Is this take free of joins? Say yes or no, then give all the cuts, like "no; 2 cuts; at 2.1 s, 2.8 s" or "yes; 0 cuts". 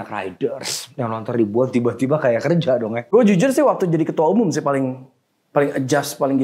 no; 1 cut; at 3.1 s